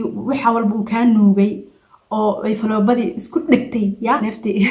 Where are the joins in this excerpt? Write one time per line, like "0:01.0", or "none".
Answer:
none